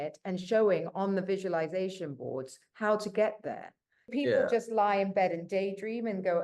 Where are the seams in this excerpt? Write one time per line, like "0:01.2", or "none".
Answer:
0:04.1